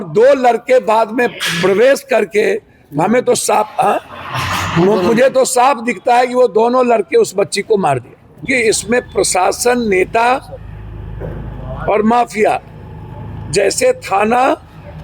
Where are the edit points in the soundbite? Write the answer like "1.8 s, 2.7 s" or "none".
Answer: 8.4 s